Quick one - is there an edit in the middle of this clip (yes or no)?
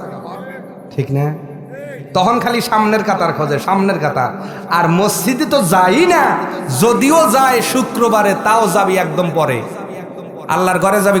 no